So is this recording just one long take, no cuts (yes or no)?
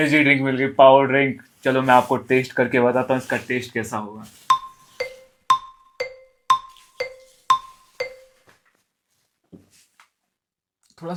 yes